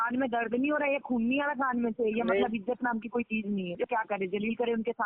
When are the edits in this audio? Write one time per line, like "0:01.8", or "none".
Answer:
0:03.8